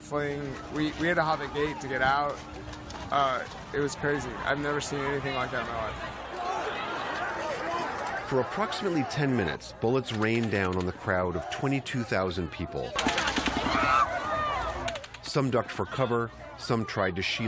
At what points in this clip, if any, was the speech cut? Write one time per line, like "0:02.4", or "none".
0:05.7